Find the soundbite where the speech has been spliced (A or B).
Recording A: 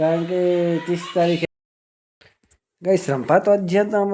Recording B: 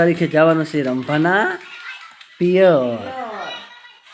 A